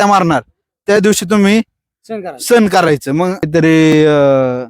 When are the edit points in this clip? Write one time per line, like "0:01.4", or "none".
0:03.5